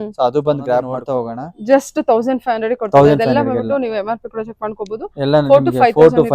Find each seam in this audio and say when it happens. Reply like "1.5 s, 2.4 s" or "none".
1.1 s